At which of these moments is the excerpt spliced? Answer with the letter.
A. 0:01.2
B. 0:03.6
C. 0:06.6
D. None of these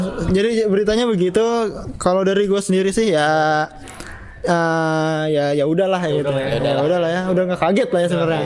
D